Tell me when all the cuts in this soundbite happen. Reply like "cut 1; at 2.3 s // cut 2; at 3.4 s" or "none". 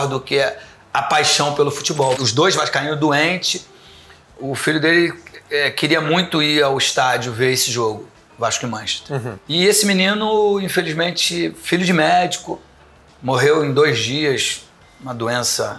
cut 1; at 2.2 s // cut 2; at 9.3 s